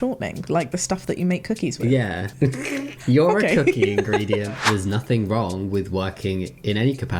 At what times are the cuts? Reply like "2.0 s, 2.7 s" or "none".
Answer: 2.5 s, 4.6 s